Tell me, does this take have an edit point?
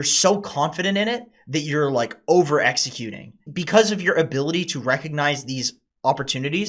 yes; 1 cut; at 3.5 s

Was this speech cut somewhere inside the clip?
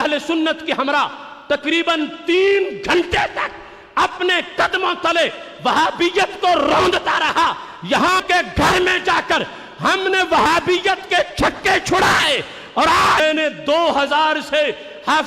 yes; 2 cuts; at 8.2 s, 13.2 s

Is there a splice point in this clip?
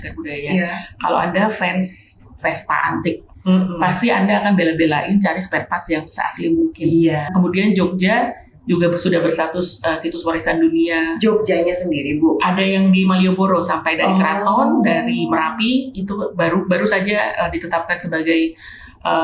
yes; 1 cut; at 7.3 s

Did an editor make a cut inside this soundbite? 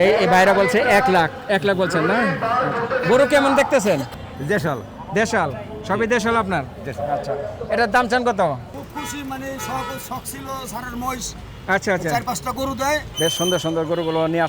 yes; 3 cuts; at 4.1 s, 8.7 s, 13.1 s

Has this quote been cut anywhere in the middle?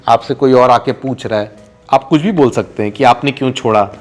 no; 0 cuts

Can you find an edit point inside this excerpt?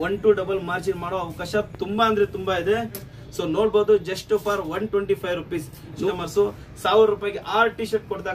yes; 2 cuts; at 3.1 s, 6.1 s

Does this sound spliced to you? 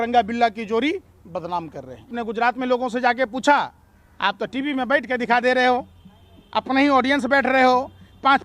yes; 1 cut; at 2.2 s

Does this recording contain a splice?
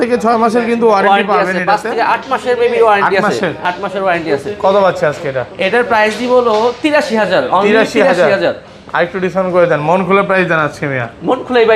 no; 0 cuts

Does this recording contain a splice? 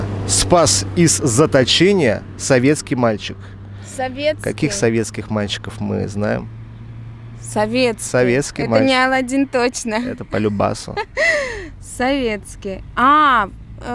no; 0 cuts

